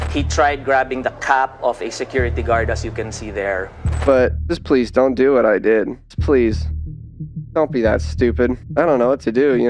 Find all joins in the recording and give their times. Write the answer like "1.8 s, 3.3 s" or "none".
3.9 s